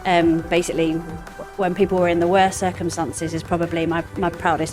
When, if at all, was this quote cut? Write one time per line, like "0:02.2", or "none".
none